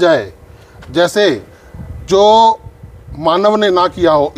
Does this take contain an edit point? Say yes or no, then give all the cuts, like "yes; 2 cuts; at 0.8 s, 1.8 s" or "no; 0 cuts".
no; 0 cuts